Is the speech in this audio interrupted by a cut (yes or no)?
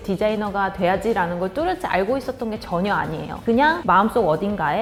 no